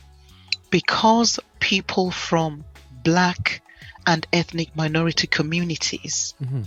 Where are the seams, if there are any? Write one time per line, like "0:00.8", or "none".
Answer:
none